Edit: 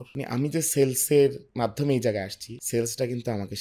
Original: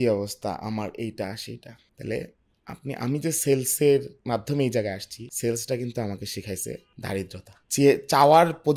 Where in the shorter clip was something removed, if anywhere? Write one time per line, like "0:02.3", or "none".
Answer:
none